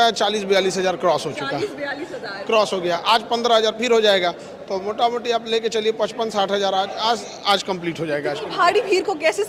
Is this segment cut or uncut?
uncut